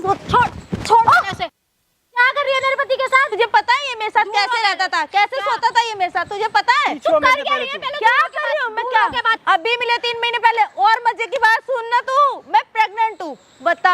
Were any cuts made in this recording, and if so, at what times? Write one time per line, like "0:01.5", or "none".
0:03.3
0:09.3

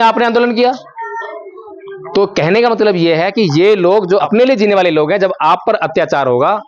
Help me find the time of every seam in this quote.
0:04.3

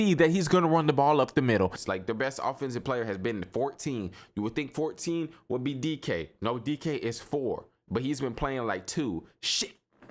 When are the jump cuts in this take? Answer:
0:01.8

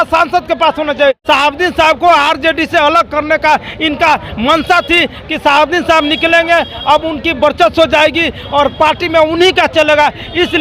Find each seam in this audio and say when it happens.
0:01.2

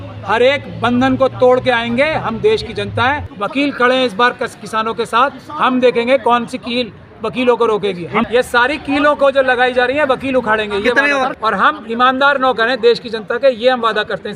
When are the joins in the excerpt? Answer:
0:03.3
0:08.3
0:11.3

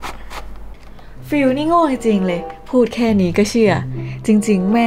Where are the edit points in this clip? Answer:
0:01.2

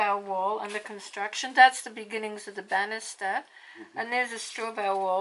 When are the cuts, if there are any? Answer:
none

